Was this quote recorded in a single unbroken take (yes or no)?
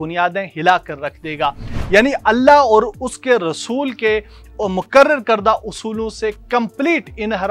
no